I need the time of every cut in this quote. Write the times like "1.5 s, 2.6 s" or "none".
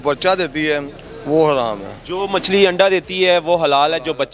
none